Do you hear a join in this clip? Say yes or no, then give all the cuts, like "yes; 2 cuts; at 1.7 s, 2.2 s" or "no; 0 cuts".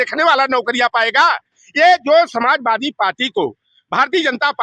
no; 0 cuts